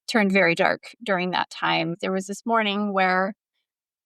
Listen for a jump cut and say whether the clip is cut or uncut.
cut